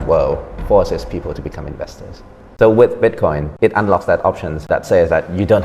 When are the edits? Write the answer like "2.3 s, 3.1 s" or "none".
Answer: 2.4 s, 3.5 s, 4.7 s